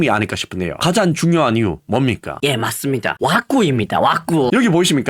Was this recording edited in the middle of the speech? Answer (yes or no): yes